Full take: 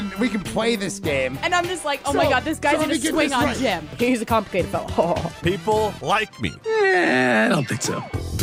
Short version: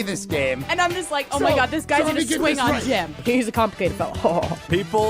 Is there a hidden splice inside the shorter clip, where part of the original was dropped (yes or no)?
no